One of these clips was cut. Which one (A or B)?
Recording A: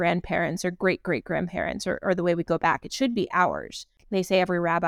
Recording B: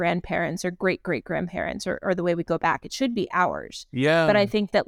A